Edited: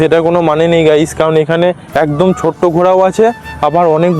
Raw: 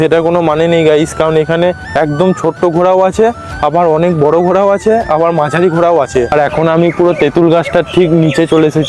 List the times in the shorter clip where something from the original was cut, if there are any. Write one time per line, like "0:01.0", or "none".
none